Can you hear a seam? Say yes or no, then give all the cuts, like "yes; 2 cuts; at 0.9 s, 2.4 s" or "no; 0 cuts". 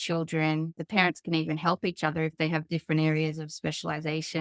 no; 0 cuts